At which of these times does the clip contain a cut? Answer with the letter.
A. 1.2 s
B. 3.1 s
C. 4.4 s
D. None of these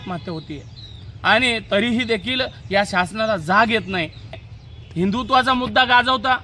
C